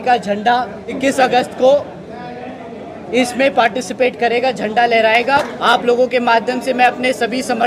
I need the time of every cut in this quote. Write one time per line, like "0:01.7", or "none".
0:01.0
0:05.3